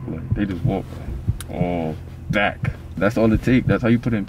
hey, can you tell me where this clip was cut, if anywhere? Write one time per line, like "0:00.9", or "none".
0:02.9